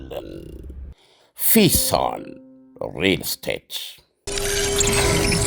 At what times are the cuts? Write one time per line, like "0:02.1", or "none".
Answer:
0:04.2